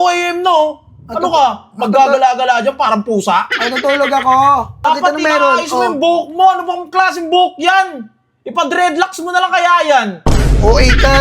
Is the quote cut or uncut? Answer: cut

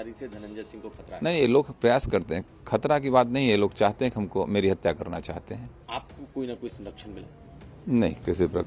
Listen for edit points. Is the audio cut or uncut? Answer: cut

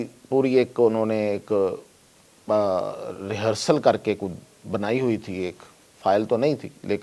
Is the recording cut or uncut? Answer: uncut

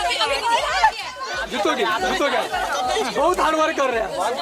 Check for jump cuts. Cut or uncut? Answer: cut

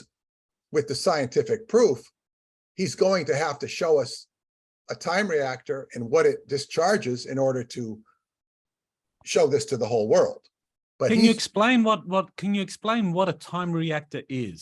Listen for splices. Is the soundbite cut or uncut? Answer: uncut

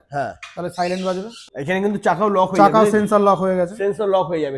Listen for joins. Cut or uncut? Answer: cut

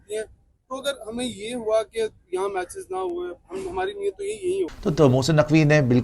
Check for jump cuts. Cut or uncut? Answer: cut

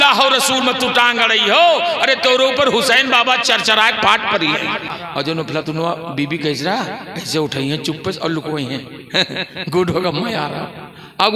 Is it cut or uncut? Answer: cut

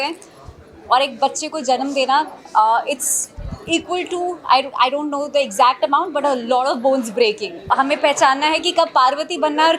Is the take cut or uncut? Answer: cut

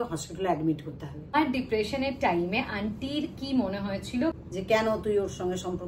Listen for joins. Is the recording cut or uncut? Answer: cut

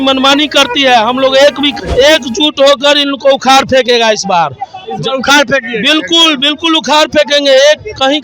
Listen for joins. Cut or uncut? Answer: cut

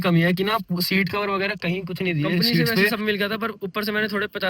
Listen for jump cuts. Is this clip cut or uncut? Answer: cut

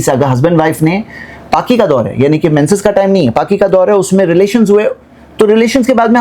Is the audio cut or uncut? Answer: uncut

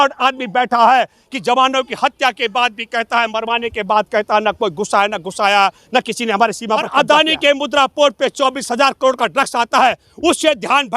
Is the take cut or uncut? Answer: cut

